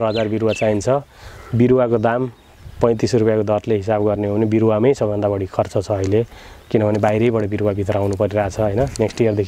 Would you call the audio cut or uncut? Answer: uncut